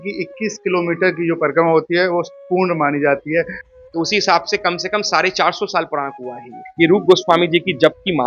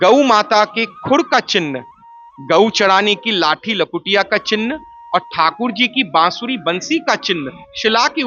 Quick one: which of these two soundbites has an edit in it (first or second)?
first